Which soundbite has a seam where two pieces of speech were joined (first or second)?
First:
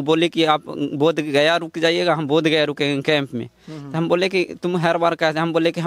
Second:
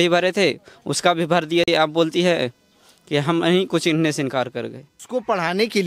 second